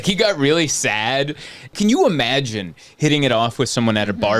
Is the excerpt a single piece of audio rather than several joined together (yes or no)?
no